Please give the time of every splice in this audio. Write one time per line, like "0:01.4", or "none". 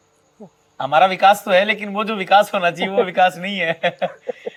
none